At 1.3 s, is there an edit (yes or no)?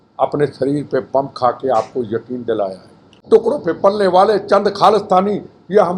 no